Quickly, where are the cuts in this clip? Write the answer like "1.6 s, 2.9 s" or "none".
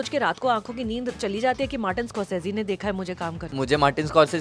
3.5 s